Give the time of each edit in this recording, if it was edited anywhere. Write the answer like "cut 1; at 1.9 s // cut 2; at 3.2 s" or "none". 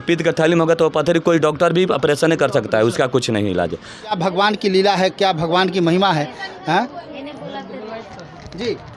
cut 1; at 4.2 s